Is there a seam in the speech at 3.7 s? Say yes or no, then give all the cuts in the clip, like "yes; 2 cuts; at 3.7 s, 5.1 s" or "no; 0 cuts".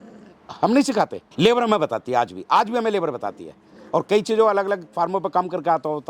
no; 0 cuts